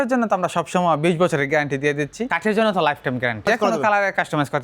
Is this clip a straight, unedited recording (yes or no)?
no